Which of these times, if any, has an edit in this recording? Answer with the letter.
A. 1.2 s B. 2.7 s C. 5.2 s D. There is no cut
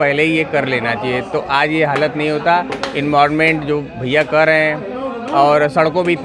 D